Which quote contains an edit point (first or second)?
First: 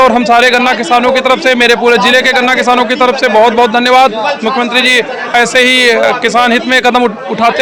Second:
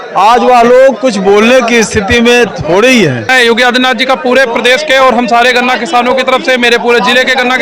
second